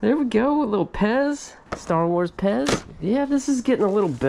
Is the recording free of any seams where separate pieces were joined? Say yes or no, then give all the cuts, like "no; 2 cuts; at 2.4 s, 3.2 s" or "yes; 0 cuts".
yes; 0 cuts